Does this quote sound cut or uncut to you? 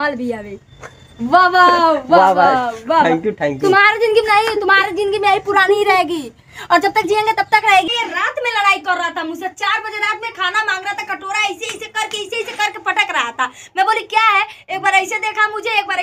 cut